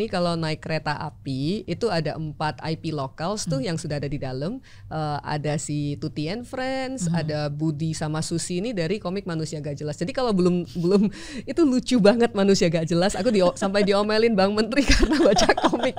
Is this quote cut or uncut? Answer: uncut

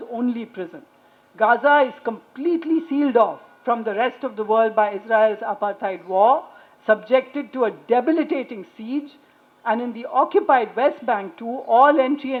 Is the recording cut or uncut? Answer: uncut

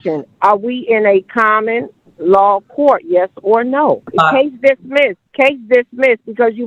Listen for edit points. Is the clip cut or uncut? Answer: cut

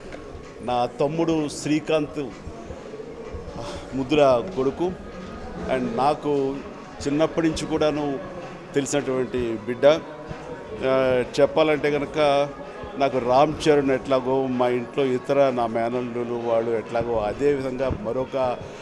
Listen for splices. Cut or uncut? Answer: uncut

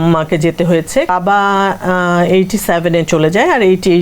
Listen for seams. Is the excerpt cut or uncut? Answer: cut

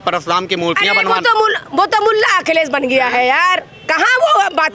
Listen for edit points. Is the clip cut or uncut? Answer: uncut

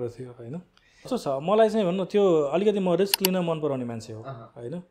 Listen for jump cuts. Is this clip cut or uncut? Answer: cut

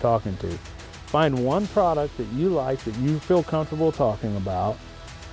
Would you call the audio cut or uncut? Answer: uncut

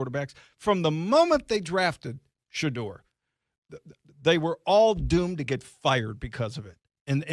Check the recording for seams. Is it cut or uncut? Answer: uncut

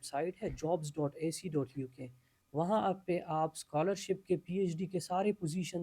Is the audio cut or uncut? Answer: uncut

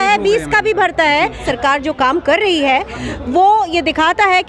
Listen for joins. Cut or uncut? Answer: cut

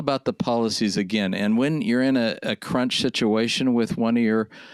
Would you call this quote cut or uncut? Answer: uncut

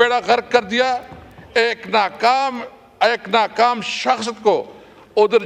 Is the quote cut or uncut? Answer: uncut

